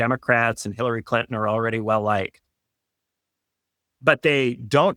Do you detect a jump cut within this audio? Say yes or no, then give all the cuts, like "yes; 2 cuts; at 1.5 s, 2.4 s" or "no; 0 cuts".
no; 0 cuts